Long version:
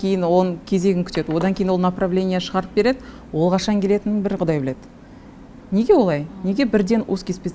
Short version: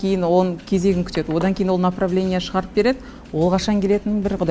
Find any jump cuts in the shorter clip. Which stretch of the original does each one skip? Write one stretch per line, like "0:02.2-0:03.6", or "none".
none